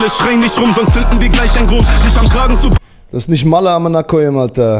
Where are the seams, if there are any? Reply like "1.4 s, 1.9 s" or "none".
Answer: none